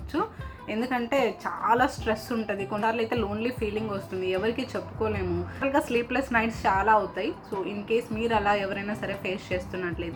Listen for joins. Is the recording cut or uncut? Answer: uncut